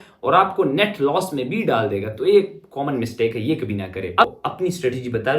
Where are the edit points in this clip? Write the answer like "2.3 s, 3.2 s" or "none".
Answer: 4.3 s